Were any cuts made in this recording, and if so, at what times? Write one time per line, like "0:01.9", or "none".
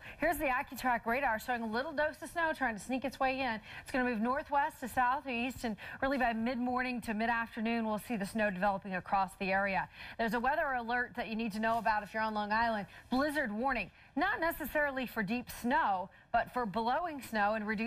none